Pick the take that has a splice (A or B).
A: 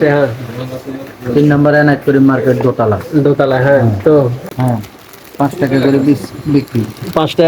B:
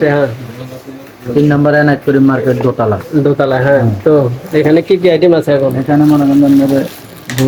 A